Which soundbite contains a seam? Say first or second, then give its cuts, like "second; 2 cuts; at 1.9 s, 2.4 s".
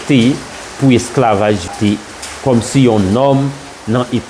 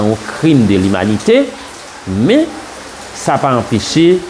first; 1 cut; at 1.7 s